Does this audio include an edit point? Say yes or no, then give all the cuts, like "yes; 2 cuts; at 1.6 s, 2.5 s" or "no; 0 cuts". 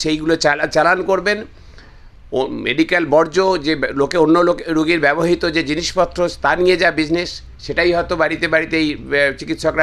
no; 0 cuts